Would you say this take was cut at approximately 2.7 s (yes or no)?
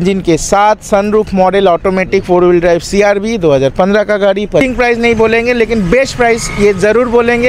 no